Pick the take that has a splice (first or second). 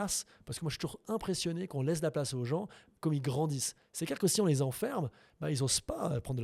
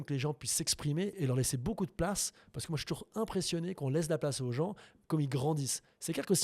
second